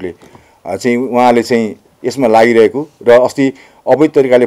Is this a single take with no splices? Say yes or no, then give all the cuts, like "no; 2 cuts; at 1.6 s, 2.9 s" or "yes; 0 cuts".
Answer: yes; 0 cuts